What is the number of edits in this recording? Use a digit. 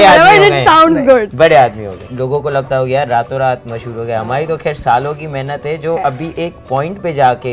1